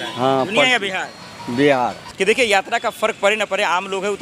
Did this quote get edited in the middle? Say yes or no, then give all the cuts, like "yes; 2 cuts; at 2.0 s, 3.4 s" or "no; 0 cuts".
yes; 1 cut; at 2.0 s